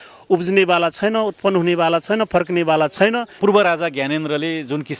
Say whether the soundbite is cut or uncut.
cut